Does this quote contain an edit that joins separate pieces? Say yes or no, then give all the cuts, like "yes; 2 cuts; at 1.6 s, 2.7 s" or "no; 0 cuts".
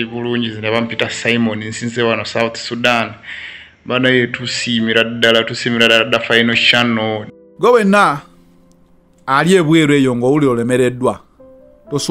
yes; 1 cut; at 7.3 s